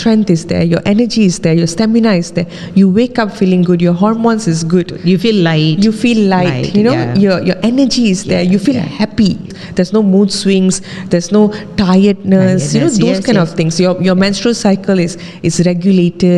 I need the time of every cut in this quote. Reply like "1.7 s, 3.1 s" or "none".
9.6 s